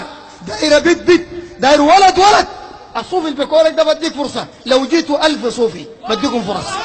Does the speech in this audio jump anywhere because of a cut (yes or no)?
no